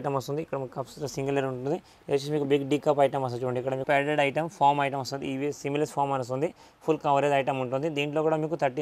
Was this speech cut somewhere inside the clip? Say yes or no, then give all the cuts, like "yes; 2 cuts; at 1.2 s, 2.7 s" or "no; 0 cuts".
yes; 1 cut; at 3.8 s